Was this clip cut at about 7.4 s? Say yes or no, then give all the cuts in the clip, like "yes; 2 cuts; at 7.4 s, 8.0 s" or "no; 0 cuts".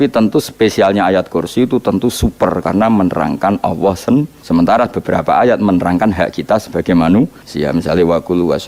yes; 2 cuts; at 4.4 s, 7.4 s